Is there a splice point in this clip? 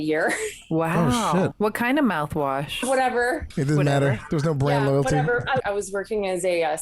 yes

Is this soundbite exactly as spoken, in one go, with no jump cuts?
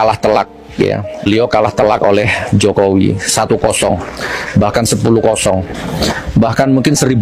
yes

